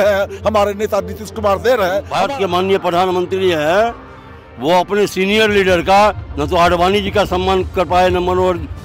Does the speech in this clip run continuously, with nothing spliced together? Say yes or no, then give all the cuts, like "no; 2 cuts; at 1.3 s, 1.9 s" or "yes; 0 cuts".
no; 1 cut; at 2.1 s